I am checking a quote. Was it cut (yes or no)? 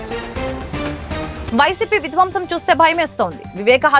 yes